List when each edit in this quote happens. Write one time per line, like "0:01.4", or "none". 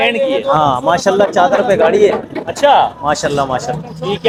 none